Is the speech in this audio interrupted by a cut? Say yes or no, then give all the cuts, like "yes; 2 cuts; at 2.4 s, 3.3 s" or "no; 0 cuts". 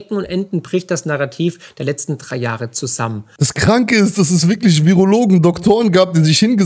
yes; 1 cut; at 3.3 s